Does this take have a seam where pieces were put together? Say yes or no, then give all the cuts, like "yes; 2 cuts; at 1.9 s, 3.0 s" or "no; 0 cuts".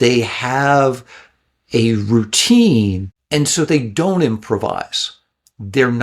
yes; 1 cut; at 3.1 s